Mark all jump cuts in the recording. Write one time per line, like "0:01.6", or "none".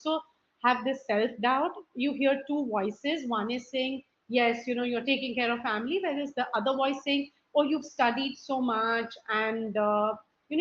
none

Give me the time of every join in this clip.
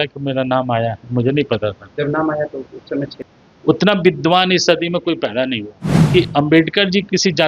0:03.2
0:06.1

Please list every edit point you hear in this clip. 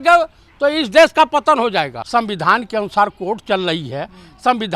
0:02.0

